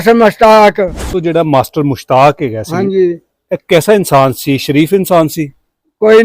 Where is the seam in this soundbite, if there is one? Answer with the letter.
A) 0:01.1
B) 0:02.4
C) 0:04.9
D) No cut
A